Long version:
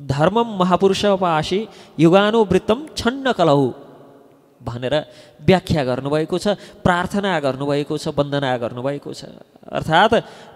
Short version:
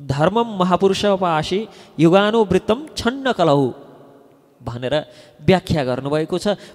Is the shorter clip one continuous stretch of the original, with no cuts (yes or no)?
yes